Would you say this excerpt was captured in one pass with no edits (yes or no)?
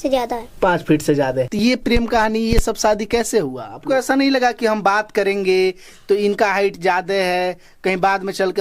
no